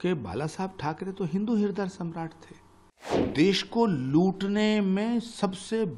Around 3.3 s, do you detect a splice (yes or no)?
yes